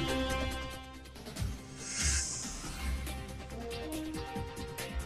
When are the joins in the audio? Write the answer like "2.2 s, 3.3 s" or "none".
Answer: 2.8 s